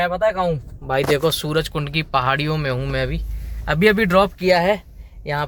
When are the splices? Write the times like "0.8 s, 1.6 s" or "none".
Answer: none